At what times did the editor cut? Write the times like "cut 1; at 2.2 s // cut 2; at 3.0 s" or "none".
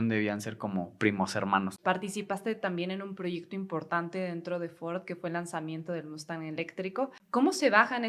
cut 1; at 1.8 s // cut 2; at 7.2 s